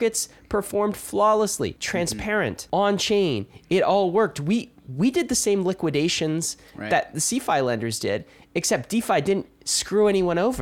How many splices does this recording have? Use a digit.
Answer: 1